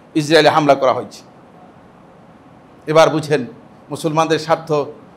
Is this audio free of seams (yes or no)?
yes